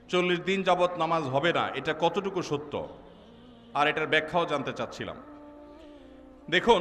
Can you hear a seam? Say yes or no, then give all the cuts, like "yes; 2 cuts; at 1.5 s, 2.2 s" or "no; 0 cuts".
no; 0 cuts